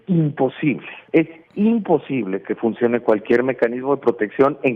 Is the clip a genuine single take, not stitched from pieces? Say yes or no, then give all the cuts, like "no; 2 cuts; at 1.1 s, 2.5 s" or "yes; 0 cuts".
no; 1 cut; at 0.9 s